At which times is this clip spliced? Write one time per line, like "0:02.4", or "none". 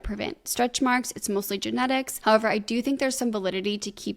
0:02.1